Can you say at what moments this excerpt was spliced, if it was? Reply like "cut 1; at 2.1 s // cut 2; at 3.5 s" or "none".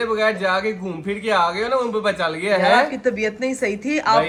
none

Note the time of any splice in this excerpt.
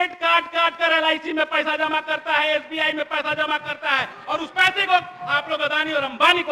none

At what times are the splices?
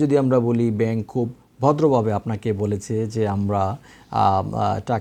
none

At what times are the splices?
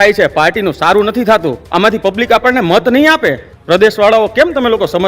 cut 1; at 1.6 s // cut 2; at 3.5 s

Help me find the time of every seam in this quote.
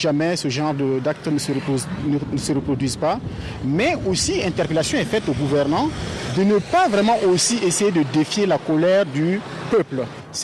none

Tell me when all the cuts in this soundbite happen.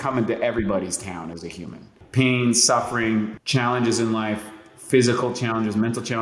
cut 1; at 2.0 s // cut 2; at 3.3 s

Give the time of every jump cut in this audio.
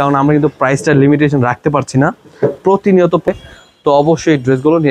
cut 1; at 3.3 s

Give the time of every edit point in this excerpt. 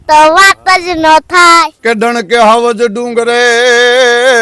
cut 1; at 1.7 s

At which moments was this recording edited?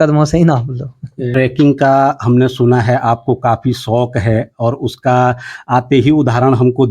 cut 1; at 1.2 s

